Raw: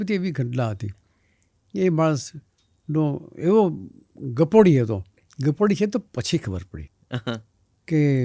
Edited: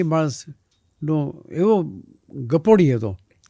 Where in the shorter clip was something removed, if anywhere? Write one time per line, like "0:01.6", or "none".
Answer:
none